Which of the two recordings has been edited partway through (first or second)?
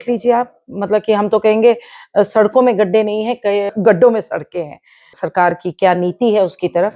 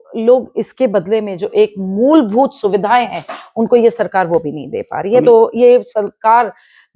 first